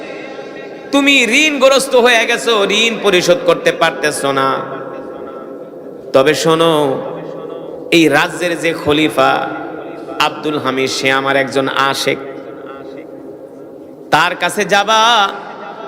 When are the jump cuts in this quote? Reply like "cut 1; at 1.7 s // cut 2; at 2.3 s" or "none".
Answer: none